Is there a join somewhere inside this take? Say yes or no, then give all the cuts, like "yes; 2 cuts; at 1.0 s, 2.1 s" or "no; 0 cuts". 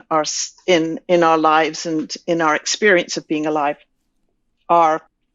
no; 0 cuts